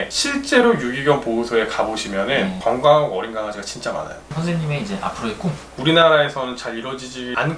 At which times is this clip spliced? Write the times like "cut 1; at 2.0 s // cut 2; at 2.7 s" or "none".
cut 1; at 4.3 s // cut 2; at 5.7 s